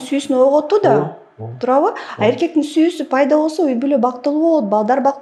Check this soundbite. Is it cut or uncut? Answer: uncut